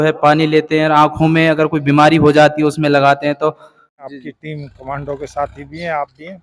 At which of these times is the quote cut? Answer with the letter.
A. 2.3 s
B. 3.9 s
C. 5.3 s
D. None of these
B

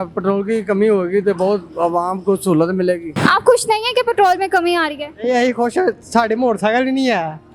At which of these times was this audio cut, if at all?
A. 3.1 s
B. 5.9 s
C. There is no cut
A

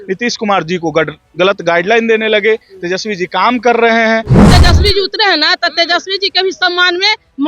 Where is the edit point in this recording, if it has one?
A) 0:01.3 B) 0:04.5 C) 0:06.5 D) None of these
B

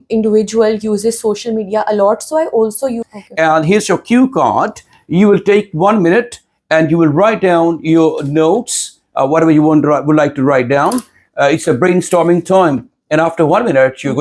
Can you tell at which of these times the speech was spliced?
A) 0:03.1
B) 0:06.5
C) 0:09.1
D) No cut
A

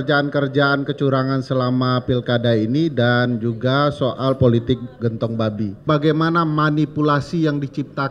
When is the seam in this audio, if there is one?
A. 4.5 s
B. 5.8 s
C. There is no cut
B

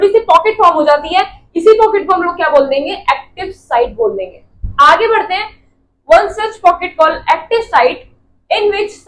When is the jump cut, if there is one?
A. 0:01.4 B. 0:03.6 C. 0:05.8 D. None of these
D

